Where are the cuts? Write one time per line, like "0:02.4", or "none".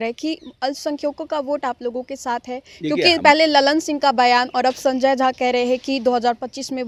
none